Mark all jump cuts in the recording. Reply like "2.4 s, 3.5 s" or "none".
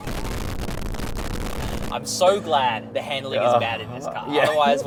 none